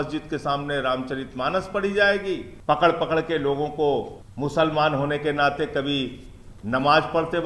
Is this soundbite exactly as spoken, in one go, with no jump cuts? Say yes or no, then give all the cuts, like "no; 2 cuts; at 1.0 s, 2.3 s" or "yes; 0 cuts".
no; 2 cuts; at 2.5 s, 4.2 s